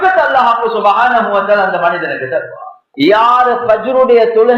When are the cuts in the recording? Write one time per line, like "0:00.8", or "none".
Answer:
0:02.8